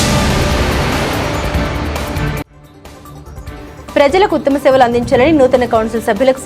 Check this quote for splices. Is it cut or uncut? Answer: cut